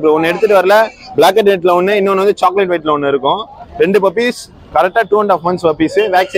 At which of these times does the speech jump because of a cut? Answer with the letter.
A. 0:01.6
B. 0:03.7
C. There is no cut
C